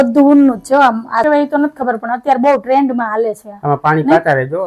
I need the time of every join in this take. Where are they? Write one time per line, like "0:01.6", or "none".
0:01.2